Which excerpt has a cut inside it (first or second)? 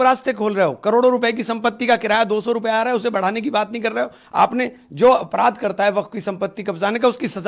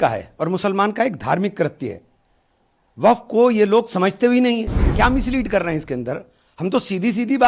second